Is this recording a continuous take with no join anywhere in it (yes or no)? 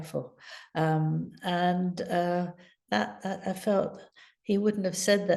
yes